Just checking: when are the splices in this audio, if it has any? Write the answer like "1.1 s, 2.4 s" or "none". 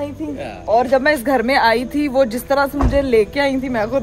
none